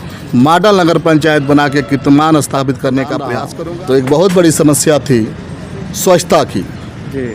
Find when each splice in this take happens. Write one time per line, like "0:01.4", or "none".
0:03.4